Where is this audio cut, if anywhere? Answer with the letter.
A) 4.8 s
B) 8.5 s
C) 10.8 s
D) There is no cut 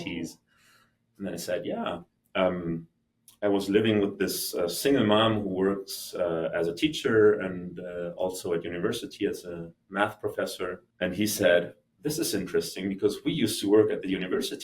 C